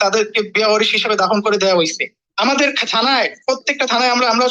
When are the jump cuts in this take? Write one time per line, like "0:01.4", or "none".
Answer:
0:02.2